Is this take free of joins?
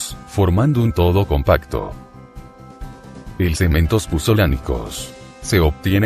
yes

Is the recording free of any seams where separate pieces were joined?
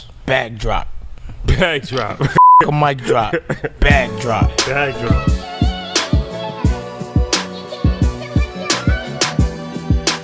yes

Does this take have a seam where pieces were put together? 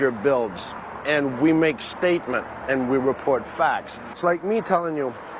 yes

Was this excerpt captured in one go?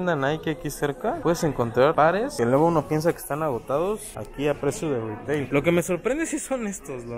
yes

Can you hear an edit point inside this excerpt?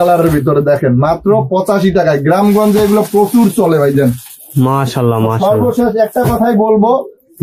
no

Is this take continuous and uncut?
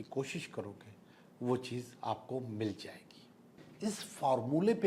no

